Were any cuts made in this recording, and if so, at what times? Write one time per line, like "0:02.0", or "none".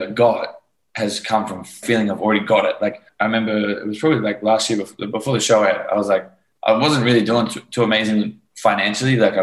0:01.8
0:03.1